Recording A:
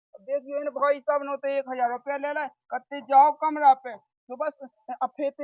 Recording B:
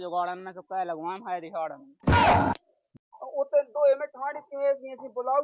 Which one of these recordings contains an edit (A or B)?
B